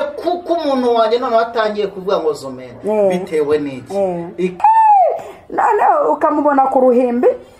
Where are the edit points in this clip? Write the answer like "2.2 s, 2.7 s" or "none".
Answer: 4.6 s